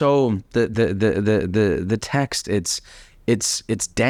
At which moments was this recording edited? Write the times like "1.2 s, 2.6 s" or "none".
none